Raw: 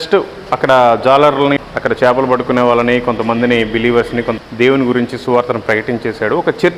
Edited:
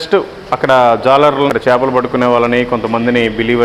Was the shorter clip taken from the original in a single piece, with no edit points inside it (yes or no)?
no